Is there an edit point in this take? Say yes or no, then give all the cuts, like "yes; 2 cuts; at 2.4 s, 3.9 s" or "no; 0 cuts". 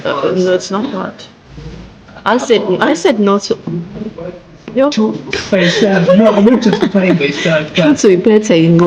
yes; 1 cut; at 5.3 s